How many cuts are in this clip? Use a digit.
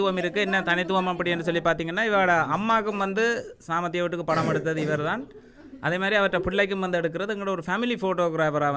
0